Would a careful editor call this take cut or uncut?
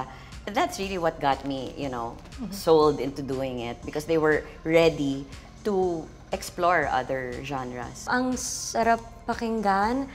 cut